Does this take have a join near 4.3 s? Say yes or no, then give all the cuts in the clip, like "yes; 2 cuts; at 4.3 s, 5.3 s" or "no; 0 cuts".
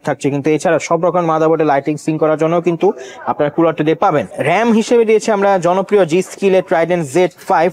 yes; 1 cut; at 4.3 s